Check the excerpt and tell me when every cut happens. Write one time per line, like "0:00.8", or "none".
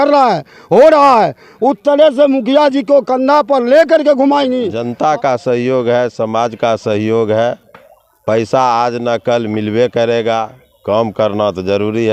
0:04.7